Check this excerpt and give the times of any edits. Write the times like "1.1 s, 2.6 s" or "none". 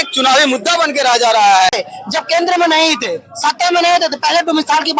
1.7 s